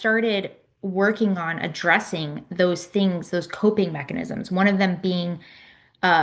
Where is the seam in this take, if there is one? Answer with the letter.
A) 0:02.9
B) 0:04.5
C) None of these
C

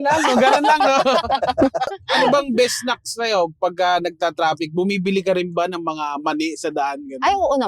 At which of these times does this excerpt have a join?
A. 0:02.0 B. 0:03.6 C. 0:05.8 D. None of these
A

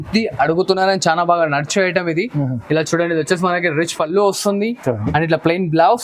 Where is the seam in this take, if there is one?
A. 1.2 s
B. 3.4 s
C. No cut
C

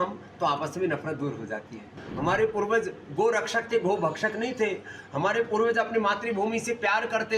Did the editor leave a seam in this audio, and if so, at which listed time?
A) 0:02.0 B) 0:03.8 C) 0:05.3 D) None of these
A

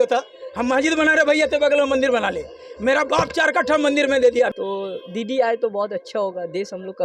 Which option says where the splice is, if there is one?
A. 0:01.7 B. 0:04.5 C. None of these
B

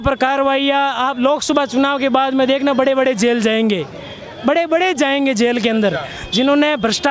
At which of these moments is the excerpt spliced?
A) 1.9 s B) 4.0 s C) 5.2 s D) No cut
D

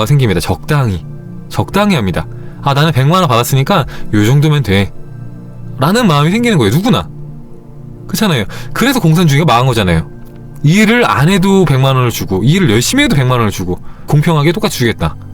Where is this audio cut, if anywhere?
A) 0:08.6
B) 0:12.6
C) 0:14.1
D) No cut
C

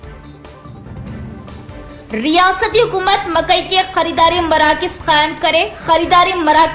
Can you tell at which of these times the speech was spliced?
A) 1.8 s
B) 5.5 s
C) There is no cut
A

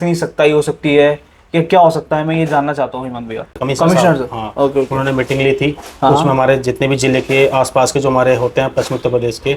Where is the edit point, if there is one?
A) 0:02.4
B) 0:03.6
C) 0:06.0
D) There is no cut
B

